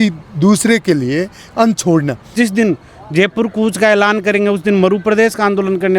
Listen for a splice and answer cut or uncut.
cut